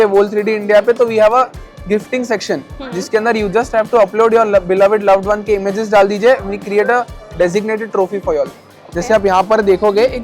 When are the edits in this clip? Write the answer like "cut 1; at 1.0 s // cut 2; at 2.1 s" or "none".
cut 1; at 8.8 s